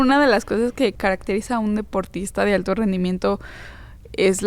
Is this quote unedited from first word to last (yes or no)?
no